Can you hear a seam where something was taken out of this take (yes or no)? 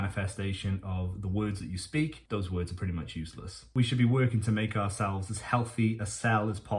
yes